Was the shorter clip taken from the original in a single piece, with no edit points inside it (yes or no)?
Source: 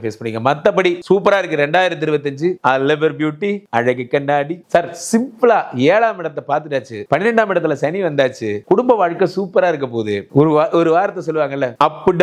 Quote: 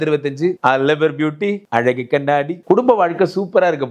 no